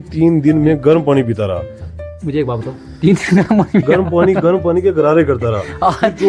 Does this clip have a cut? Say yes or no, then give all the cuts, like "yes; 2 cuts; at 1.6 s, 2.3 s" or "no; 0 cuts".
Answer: no; 0 cuts